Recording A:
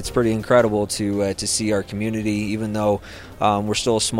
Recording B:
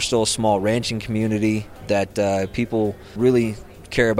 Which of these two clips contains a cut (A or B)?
B